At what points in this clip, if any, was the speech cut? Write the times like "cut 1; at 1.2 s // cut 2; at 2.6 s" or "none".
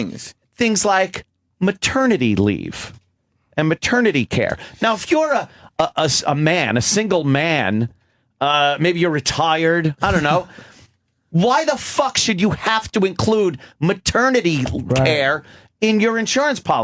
none

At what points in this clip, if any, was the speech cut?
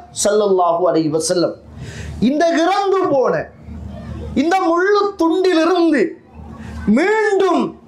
none

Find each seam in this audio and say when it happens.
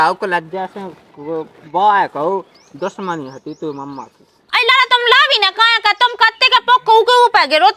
cut 1; at 4.4 s

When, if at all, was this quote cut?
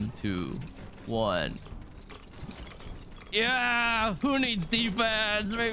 none

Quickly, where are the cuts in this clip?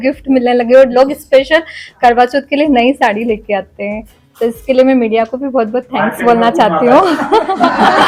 none

